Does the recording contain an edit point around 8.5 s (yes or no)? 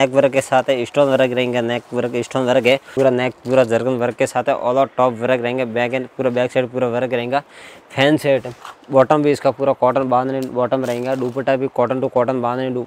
yes